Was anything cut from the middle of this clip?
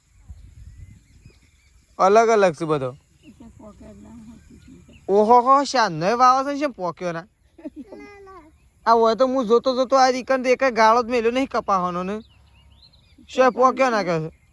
no; 0 cuts

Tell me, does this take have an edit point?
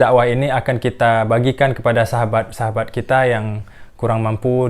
no; 0 cuts

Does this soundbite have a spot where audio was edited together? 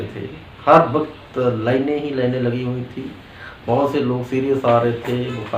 no; 0 cuts

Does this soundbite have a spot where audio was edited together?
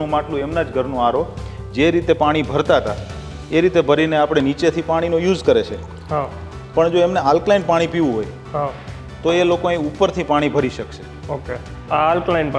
no; 0 cuts

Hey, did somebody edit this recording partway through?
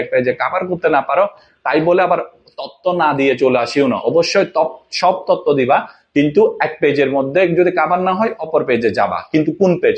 no; 0 cuts

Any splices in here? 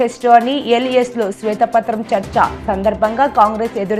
no; 0 cuts

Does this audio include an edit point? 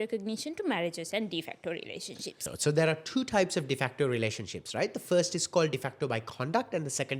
yes; 1 cut; at 2.5 s

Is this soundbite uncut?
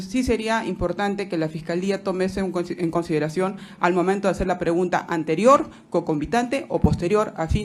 yes; 0 cuts

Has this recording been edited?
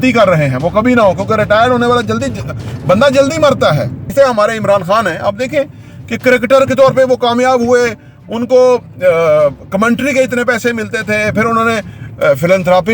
yes; 1 cut; at 4.0 s

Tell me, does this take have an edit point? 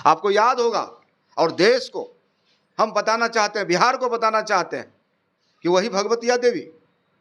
no; 0 cuts

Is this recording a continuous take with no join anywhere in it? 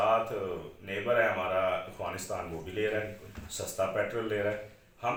yes; 0 cuts

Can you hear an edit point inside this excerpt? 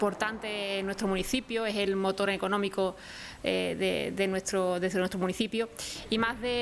no; 0 cuts

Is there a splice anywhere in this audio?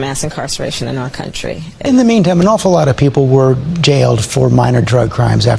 yes; 1 cut; at 1.9 s

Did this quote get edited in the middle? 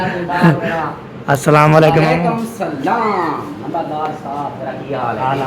no; 0 cuts

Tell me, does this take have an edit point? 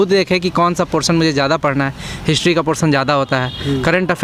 no; 0 cuts

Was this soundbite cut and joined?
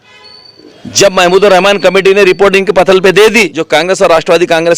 yes; 1 cut; at 3.6 s

